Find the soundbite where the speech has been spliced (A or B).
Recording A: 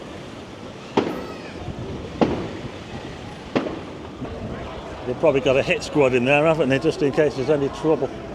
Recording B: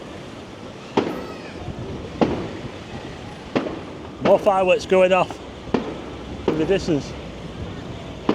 A